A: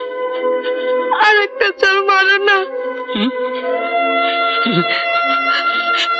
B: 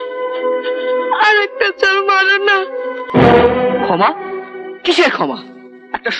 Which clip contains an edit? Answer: B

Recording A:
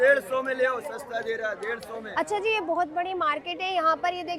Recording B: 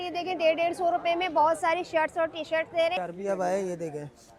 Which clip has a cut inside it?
B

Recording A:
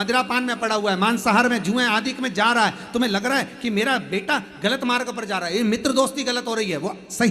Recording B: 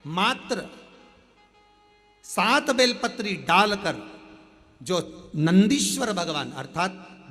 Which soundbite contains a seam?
A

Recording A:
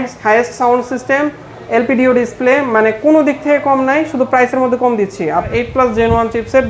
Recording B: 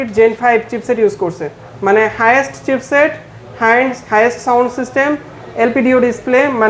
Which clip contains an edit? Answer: A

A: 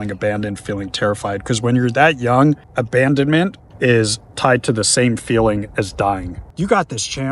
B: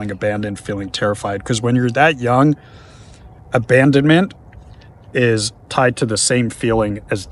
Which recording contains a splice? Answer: A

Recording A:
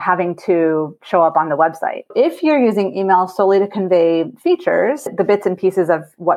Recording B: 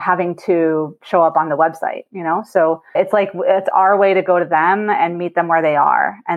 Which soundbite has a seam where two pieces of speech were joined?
A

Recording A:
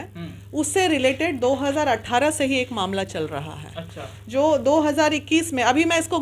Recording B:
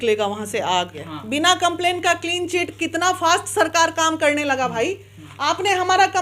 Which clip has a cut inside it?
B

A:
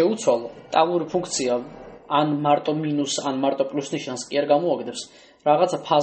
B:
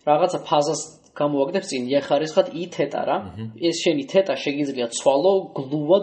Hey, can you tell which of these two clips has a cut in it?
B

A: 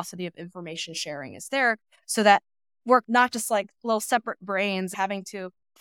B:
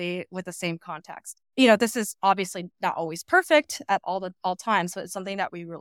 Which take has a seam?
A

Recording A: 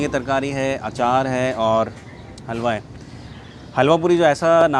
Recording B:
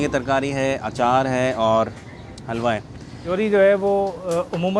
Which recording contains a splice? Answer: B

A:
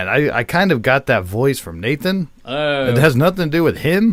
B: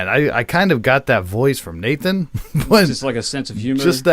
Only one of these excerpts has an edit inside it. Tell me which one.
B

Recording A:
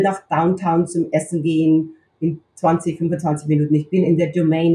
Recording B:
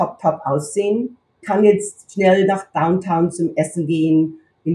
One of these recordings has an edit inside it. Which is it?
B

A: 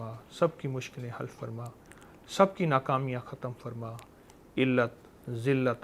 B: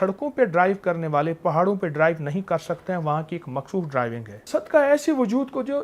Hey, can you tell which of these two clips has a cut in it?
B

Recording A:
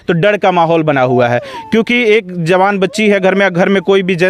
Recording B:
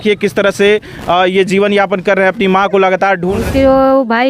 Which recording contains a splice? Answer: B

